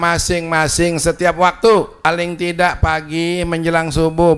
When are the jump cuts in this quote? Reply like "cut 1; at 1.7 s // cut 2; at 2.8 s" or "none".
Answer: cut 1; at 2.1 s